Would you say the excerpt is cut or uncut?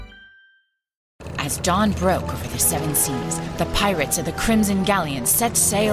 cut